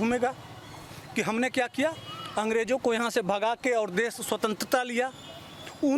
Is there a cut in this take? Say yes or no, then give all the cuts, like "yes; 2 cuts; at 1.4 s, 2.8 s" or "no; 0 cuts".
no; 0 cuts